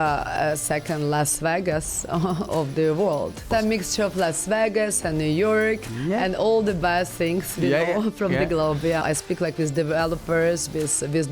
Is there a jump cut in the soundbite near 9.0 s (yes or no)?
yes